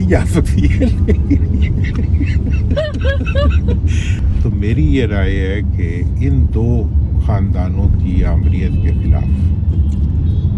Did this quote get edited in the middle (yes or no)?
yes